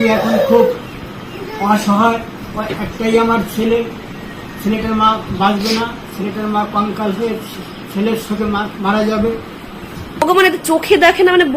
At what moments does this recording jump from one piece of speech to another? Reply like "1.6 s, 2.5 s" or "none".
10.2 s